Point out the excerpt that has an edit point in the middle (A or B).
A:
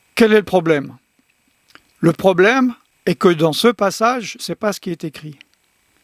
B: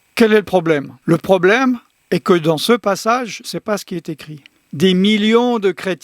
B